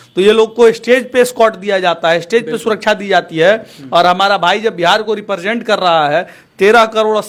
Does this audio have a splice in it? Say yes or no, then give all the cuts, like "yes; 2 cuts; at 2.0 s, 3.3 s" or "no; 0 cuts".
no; 0 cuts